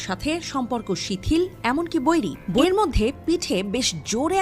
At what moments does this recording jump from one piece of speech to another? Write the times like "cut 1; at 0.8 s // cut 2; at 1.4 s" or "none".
cut 1; at 2.6 s

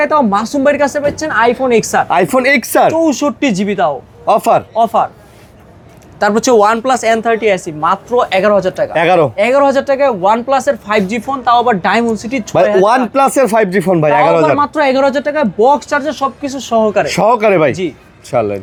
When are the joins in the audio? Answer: none

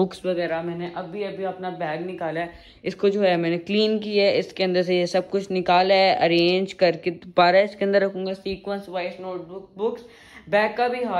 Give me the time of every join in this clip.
none

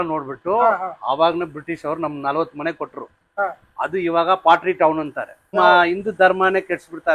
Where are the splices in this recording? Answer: cut 1; at 5.5 s

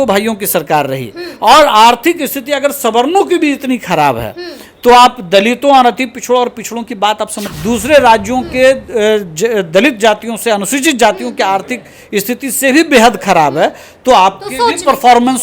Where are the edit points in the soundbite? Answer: cut 1; at 7.5 s

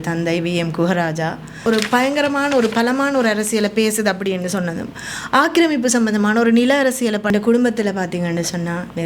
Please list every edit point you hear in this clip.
cut 1; at 1.7 s // cut 2; at 7.3 s

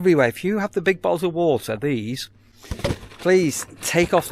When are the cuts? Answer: none

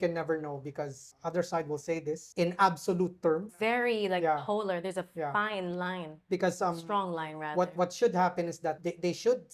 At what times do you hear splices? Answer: cut 1; at 1.1 s // cut 2; at 2.3 s // cut 3; at 3.5 s // cut 4; at 8.8 s

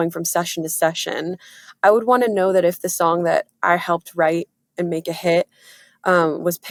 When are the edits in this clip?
none

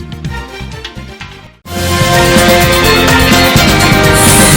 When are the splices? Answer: cut 1; at 1.7 s

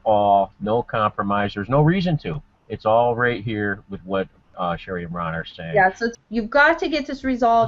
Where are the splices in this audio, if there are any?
cut 1; at 6.1 s

